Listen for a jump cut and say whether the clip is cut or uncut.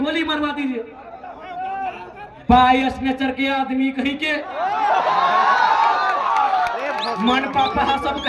uncut